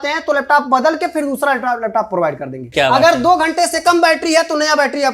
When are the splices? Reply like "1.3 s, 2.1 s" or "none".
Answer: 2.7 s